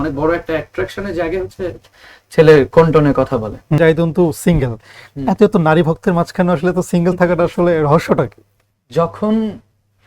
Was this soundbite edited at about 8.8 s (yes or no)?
no